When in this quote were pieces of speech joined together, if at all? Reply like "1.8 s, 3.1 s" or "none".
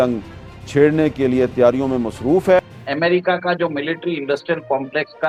none